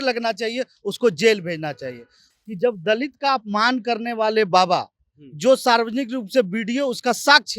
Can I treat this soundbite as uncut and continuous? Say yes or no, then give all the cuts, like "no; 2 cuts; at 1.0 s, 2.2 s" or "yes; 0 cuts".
no; 1 cut; at 2.3 s